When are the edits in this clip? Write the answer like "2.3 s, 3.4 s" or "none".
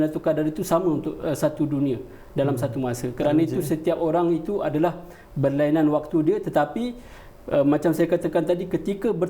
none